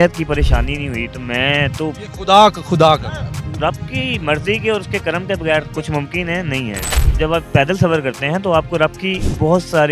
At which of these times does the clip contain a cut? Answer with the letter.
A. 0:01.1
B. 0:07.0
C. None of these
B